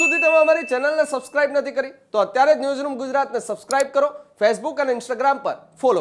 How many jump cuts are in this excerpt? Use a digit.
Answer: 0